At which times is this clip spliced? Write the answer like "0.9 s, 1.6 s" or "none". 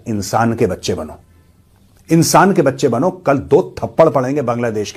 none